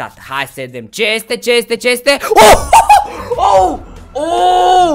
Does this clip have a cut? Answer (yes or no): no